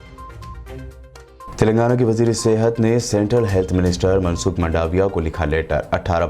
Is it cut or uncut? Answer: uncut